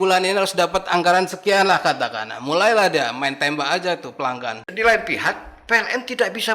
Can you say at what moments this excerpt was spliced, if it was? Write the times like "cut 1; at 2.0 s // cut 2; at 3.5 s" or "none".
cut 1; at 4.6 s